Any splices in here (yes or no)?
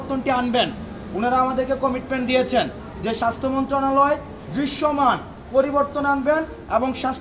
no